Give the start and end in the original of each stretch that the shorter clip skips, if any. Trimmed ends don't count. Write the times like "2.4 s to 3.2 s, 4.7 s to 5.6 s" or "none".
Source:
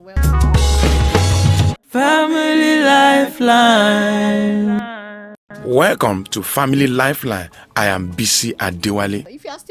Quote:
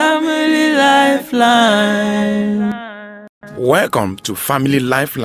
none

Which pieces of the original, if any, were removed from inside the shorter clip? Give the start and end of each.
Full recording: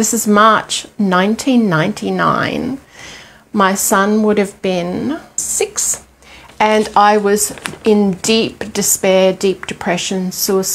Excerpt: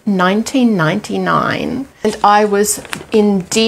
3.0 s to 6.8 s

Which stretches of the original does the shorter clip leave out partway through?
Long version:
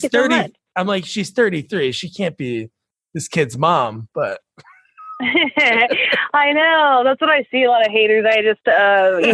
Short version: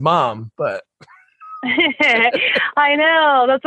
none

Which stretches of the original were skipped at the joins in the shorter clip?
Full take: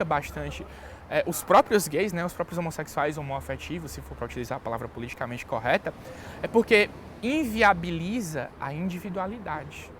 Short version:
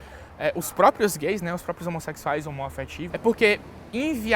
3.7 s to 6.3 s

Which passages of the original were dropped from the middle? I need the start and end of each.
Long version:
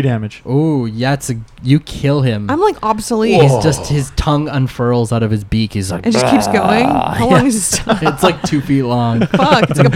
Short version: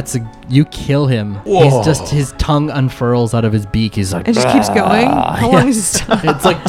2.5 s to 3.1 s

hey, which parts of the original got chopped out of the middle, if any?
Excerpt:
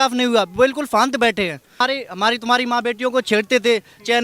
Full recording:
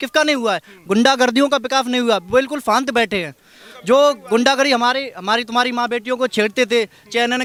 3.6 s to 4.9 s

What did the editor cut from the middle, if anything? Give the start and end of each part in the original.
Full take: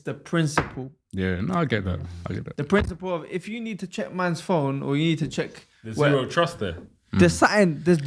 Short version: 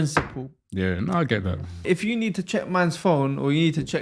2.2 s to 3.2 s

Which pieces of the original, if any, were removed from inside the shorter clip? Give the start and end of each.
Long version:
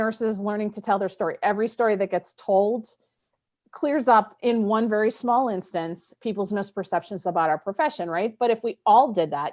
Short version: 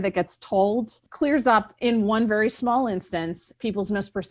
3.0 s to 3.6 s

